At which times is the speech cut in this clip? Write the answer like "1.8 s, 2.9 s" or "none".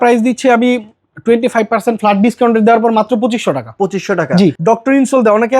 4.6 s